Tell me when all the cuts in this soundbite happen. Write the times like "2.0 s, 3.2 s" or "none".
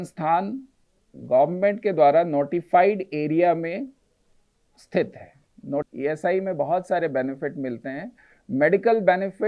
5.9 s